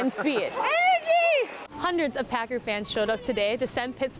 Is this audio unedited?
no; 1 cut; at 1.6 s

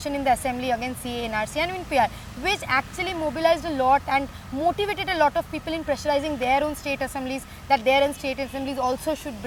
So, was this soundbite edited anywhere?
no; 0 cuts

